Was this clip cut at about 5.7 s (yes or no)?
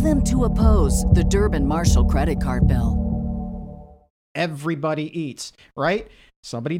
no